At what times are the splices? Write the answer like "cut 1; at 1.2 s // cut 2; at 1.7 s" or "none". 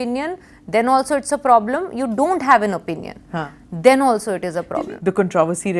cut 1; at 4.7 s